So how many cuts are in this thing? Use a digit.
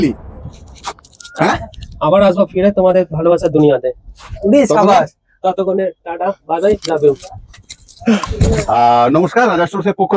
0